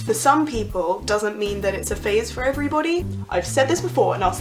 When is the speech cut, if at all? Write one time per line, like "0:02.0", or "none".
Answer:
0:03.2